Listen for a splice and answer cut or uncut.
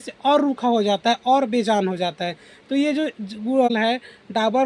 cut